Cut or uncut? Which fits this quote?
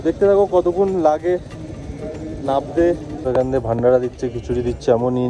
cut